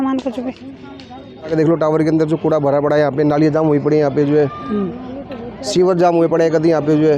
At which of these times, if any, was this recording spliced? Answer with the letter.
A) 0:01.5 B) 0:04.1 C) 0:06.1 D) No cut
A